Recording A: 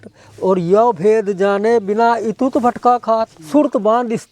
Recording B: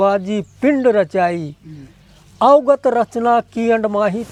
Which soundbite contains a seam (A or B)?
A